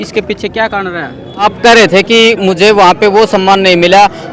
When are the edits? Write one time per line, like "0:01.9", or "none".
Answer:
0:01.4